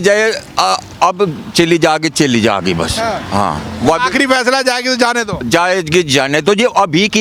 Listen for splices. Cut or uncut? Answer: uncut